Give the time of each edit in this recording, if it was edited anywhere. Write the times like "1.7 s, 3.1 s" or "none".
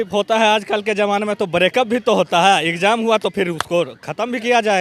none